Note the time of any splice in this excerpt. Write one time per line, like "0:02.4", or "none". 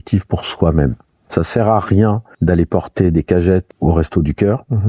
0:01.2
0:02.3
0:03.7